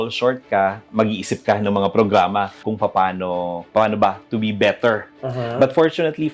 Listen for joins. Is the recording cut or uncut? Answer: cut